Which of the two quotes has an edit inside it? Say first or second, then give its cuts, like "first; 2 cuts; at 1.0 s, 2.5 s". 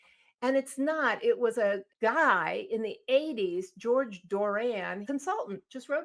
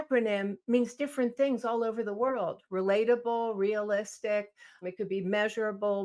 first; 2 cuts; at 1.9 s, 5.0 s